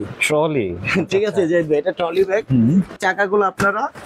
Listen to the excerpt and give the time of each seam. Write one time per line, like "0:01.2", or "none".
0:03.0

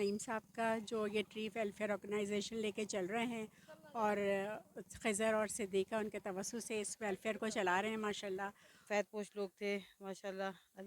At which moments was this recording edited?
0:08.8

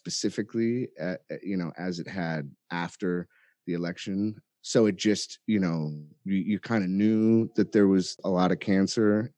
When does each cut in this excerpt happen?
0:04.5
0:08.2

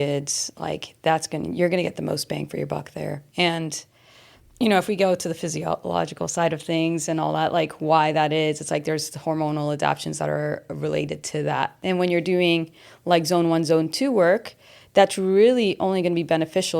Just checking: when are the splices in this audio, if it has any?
0:03.2
0:11.8

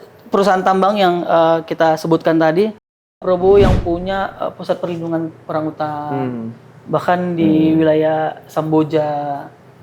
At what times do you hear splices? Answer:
0:03.0

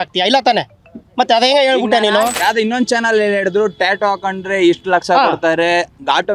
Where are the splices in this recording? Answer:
0:02.4

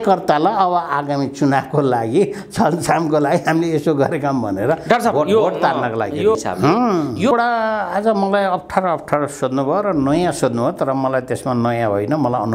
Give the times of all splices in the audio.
0:06.4
0:07.3

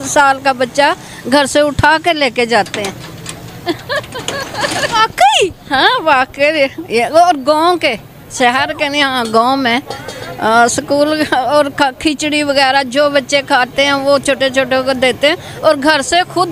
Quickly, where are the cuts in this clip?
none

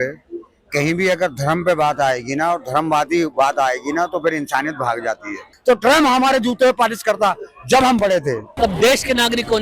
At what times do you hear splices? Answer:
0:05.5
0:08.5

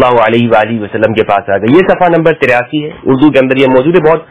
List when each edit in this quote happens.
none

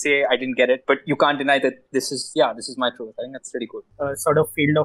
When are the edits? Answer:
0:03.9

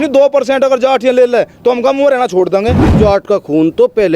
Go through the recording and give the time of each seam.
0:02.9

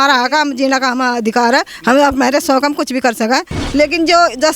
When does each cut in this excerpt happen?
0:03.5

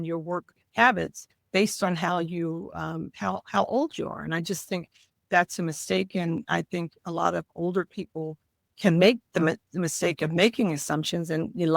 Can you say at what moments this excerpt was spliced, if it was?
0:08.7

